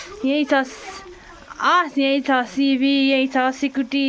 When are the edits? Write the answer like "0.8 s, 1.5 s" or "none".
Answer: none